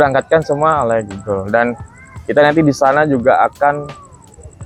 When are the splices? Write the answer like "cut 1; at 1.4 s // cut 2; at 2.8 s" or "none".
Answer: none